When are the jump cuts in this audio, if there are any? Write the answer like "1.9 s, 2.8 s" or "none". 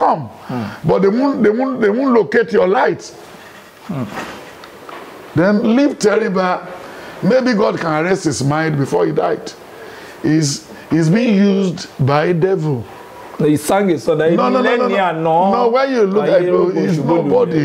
none